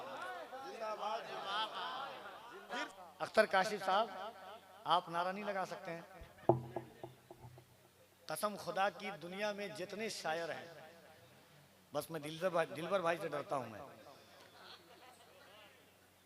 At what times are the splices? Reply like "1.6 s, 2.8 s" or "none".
2.8 s